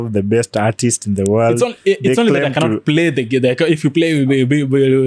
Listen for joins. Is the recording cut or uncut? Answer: uncut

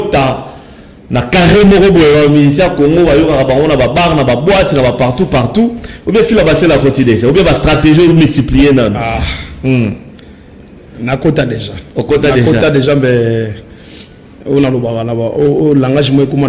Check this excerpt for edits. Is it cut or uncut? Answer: uncut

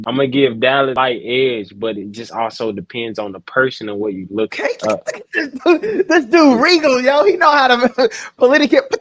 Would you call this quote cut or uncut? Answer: cut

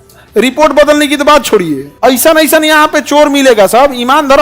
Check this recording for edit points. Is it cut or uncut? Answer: cut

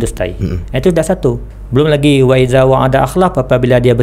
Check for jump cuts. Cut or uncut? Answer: cut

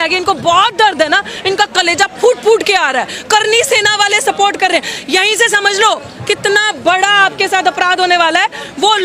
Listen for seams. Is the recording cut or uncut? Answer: uncut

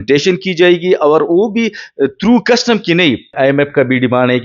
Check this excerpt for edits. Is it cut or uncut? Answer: cut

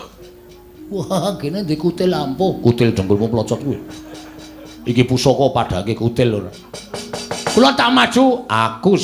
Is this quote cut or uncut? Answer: uncut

